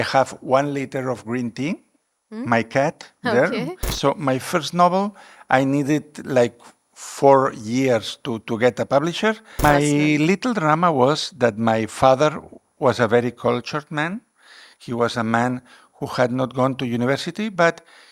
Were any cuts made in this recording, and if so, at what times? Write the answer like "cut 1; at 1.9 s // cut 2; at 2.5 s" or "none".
cut 1; at 3.9 s // cut 2; at 9.6 s

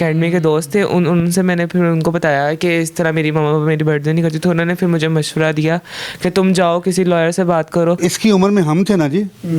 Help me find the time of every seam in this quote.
cut 1; at 8.0 s

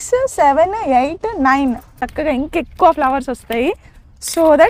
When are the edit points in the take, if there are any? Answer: cut 1; at 2.1 s

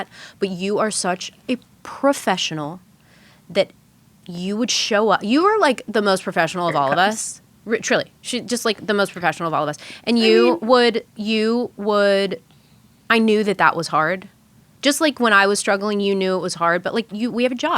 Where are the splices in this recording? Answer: none

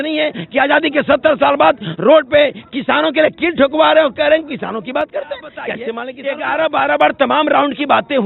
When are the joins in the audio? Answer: cut 1; at 6.1 s

